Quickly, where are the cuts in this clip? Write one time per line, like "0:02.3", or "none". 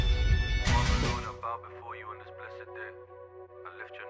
0:01.1

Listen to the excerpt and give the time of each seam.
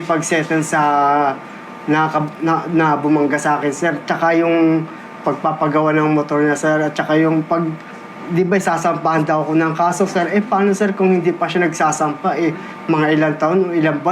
none

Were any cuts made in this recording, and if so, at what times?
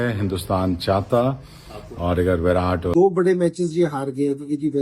0:02.9

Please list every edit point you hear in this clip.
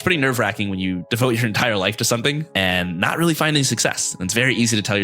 0:01.1
0:02.4

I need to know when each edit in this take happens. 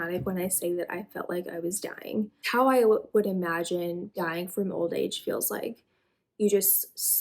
0:02.5

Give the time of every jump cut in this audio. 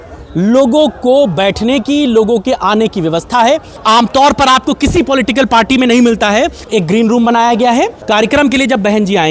0:03.8
0:06.6
0:08.0

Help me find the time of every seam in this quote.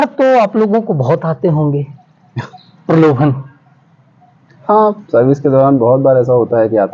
none

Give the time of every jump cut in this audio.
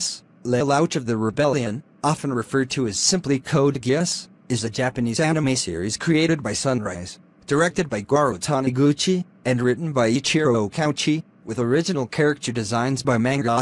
0:01.3

